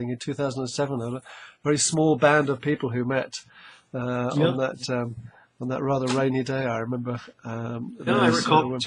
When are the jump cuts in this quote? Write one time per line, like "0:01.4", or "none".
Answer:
0:06.9